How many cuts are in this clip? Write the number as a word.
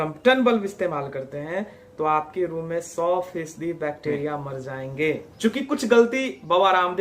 one